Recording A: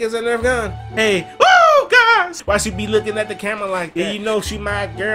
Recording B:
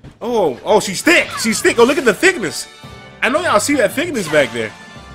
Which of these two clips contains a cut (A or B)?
A